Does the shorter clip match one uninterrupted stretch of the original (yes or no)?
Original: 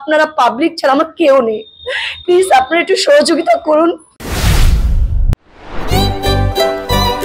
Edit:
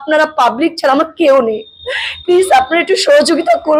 yes